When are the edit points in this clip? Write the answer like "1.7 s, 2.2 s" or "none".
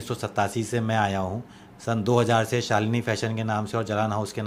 none

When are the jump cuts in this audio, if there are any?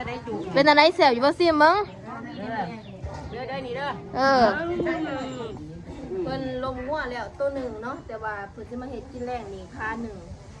5.5 s

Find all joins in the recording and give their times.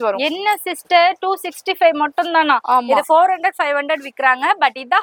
none

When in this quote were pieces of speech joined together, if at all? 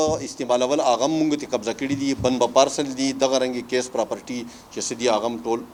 none

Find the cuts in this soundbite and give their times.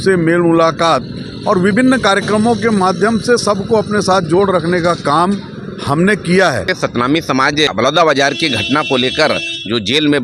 6.7 s, 7.7 s

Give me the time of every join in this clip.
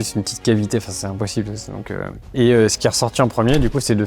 2.2 s

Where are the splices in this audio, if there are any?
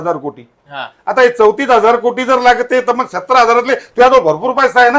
none

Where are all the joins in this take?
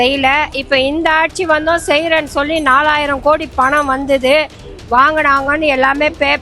none

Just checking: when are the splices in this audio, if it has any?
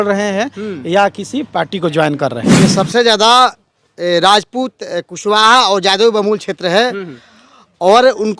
2.6 s

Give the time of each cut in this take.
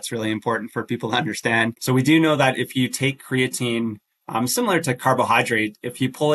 1.8 s

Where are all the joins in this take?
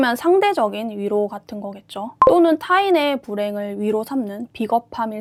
none

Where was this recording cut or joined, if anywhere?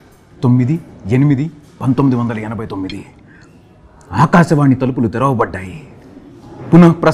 none

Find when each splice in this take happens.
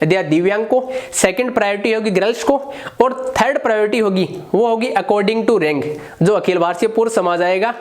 none

